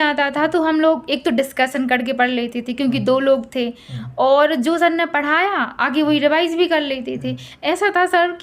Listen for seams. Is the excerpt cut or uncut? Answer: uncut